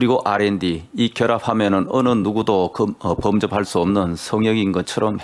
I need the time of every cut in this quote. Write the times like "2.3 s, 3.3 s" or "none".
none